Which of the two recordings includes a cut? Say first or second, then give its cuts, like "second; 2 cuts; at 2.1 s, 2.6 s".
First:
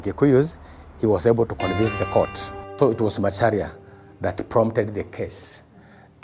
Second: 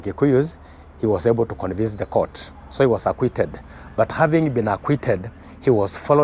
first; 1 cut; at 2.6 s